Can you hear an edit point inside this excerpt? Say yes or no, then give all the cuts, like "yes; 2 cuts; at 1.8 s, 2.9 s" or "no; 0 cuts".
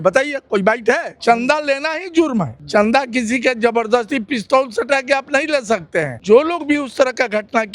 yes; 3 cuts; at 1.1 s, 2.6 s, 6.1 s